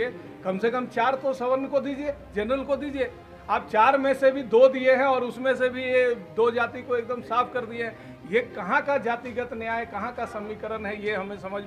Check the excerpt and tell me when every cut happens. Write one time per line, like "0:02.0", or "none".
none